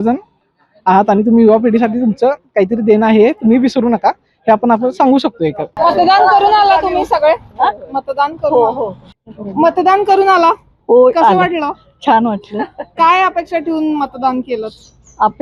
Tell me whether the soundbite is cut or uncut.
uncut